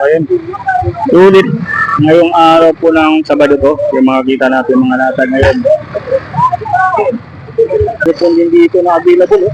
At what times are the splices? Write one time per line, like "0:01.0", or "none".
0:08.0